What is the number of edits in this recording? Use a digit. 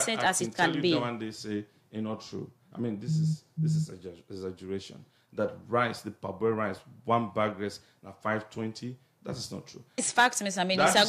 1